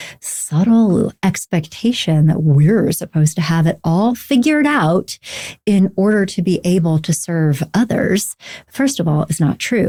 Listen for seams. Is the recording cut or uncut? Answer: uncut